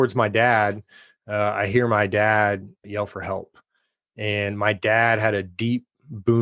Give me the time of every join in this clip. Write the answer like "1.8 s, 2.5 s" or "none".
2.8 s

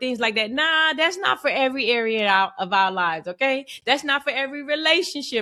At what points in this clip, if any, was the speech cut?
none

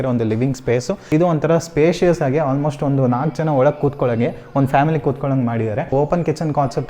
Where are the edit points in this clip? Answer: 1.0 s, 5.9 s

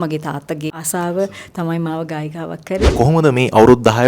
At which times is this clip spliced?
0.8 s, 2.9 s

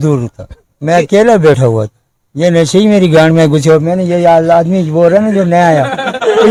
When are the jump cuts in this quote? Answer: none

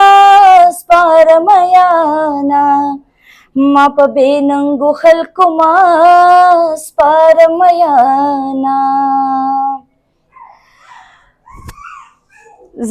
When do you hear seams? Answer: none

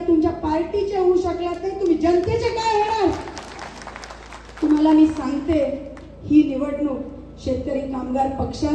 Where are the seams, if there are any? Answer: none

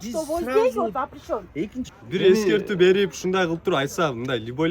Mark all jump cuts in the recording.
1.8 s

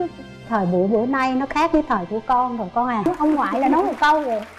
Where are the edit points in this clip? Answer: 3.1 s

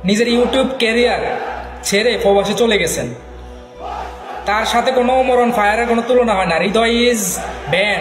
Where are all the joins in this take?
6.5 s

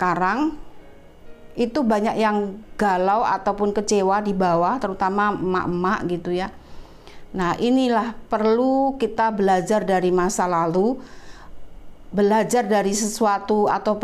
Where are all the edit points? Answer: none

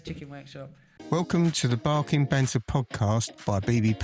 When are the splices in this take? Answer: 1.0 s

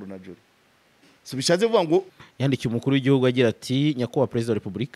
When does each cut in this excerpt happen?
2.2 s

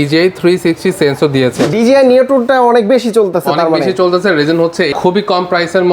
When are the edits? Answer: 1.7 s, 5.0 s

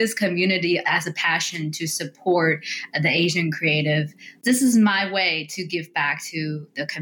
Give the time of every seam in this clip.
none

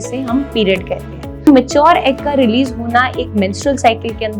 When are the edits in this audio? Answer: 1.5 s

